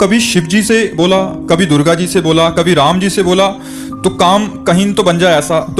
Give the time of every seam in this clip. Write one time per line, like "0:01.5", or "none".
none

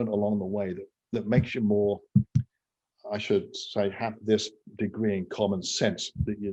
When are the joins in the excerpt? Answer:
none

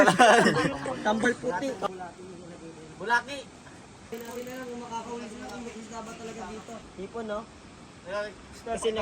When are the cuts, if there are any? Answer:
0:01.9
0:04.1
0:06.9

